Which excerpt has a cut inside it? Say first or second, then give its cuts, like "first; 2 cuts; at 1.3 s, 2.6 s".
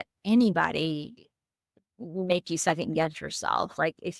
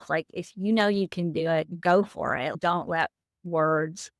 second; 2 cuts; at 1.7 s, 2.5 s